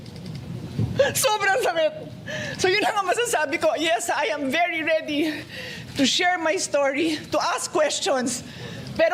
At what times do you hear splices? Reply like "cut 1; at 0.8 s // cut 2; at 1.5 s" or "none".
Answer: none